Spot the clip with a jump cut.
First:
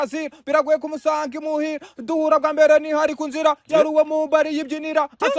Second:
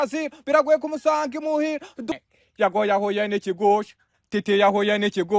second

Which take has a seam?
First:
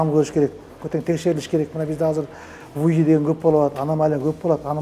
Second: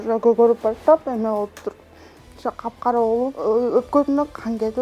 second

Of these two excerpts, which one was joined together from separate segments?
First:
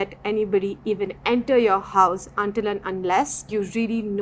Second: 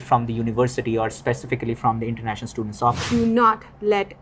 second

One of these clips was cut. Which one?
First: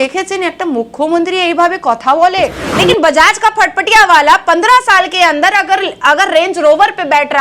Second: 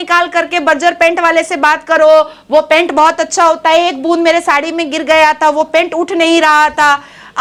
first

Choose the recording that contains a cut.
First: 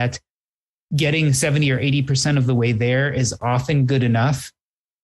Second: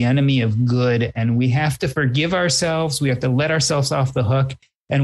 second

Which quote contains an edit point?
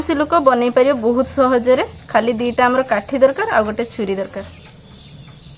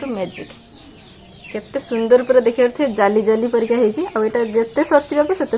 first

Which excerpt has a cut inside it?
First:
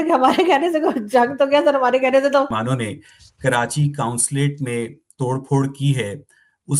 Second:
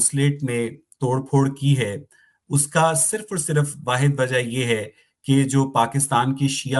first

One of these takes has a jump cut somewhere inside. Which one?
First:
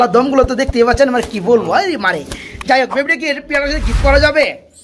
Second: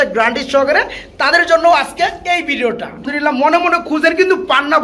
second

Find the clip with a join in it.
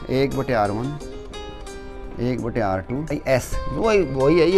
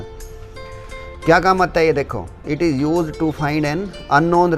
first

